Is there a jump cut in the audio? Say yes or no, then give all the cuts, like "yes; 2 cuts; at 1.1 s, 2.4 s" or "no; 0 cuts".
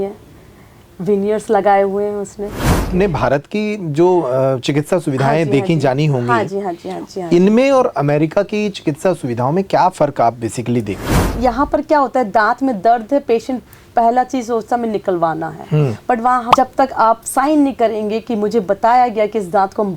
yes; 3 cuts; at 2.9 s, 11.2 s, 16.5 s